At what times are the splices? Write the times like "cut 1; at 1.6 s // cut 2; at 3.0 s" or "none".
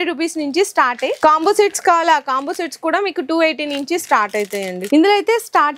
cut 1; at 1.1 s // cut 2; at 4.8 s